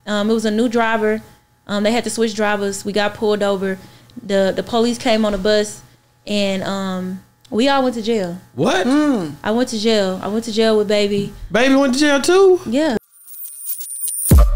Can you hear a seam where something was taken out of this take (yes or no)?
yes